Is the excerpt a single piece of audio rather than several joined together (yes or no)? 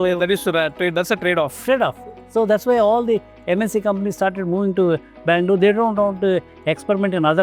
yes